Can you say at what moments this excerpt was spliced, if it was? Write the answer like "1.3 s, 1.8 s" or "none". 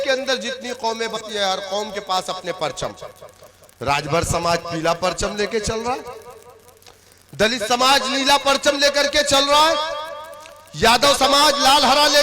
1.2 s